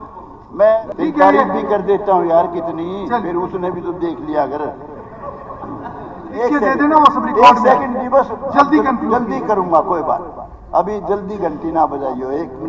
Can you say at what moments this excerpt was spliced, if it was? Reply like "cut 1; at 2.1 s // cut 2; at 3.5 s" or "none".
cut 1; at 0.8 s // cut 2; at 6.3 s